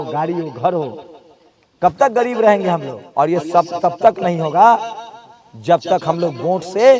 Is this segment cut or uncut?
cut